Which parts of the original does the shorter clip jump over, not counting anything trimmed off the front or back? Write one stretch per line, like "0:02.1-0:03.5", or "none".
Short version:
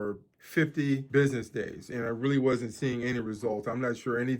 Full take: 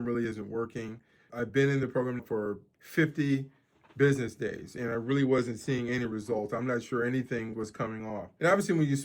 0:03.5-0:03.9